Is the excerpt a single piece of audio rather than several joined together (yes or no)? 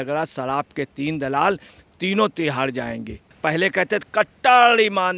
no